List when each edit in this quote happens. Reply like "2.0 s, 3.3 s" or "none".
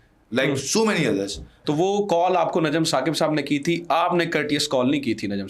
1.6 s